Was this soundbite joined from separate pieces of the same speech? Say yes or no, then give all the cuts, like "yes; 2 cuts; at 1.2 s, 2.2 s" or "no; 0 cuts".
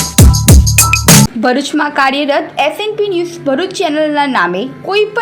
yes; 1 cut; at 1.3 s